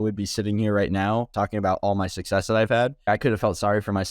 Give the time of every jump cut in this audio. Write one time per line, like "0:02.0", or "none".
0:01.3
0:03.1